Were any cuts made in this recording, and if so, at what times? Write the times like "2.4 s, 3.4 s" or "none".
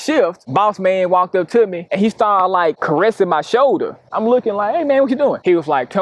none